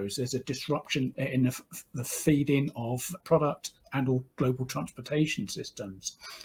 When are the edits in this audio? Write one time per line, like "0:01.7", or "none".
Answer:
none